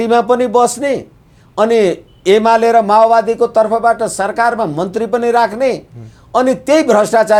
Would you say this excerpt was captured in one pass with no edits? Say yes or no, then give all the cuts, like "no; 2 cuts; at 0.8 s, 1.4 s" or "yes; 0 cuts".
yes; 0 cuts